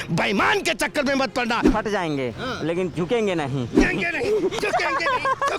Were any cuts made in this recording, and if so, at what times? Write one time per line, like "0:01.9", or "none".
0:01.6
0:03.8